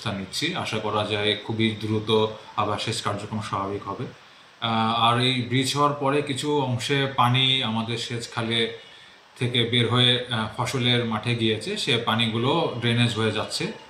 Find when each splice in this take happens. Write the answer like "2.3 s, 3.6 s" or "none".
none